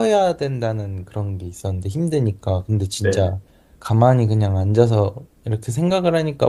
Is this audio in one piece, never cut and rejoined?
yes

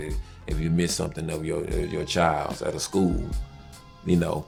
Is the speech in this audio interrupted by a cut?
no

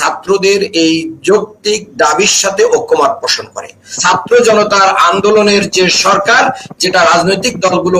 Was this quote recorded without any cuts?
no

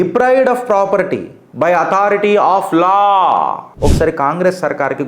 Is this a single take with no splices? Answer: no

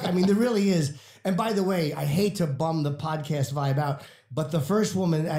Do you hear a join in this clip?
no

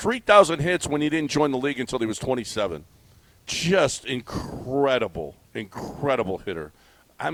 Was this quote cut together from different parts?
no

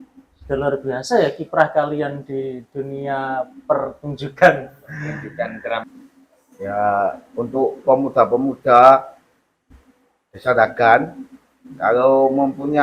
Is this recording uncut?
no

